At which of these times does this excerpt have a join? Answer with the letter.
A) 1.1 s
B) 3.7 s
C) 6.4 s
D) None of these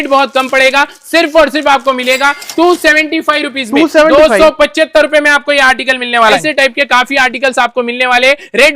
C